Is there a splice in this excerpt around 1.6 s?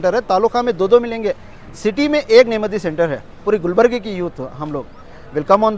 no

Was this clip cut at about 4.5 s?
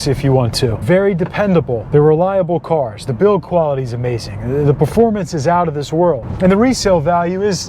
no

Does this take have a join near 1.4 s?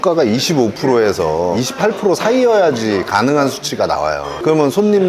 no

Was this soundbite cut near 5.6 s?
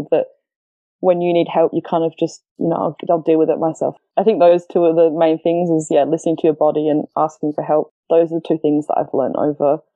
no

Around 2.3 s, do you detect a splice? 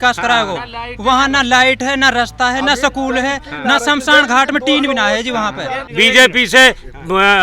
no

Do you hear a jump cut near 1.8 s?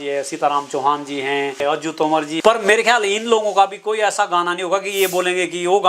yes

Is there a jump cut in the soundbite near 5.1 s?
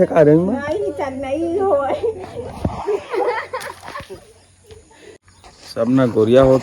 yes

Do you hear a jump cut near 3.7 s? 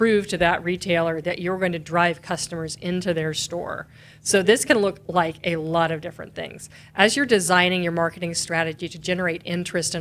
no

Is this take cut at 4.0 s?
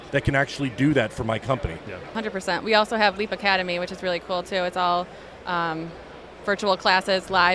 no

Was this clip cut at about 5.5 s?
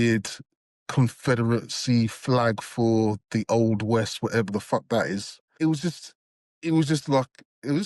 yes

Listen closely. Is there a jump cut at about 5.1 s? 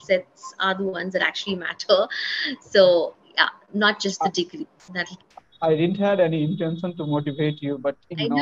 yes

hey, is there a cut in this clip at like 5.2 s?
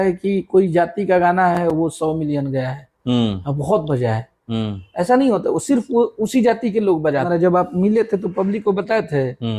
no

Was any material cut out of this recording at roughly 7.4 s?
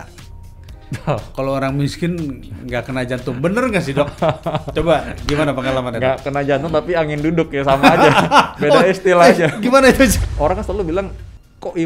no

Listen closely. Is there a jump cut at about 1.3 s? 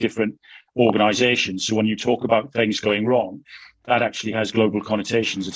no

